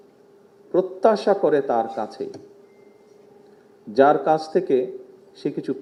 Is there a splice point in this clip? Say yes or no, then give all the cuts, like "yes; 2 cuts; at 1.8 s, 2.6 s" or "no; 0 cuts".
no; 0 cuts